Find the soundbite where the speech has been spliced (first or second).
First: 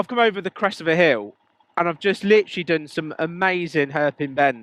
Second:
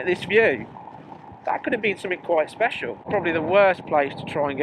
second